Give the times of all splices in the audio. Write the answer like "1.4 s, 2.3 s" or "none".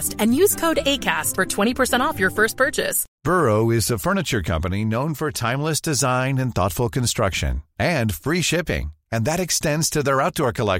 3.0 s